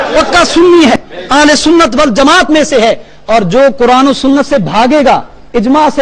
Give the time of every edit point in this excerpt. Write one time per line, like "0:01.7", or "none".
0:00.9